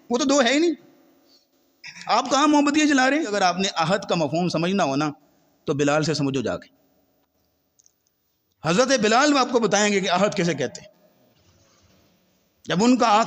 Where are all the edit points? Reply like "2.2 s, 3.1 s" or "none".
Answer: 3.3 s